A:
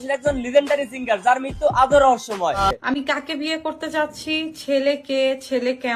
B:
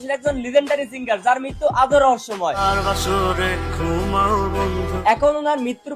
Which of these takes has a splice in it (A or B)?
A